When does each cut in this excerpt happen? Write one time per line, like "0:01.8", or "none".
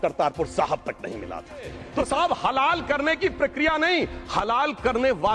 0:01.8